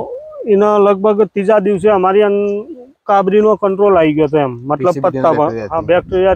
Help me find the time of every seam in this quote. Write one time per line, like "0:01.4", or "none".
none